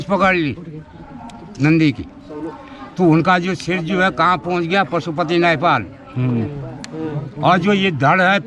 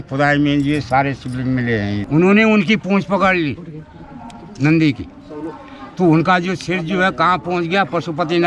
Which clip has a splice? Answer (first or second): second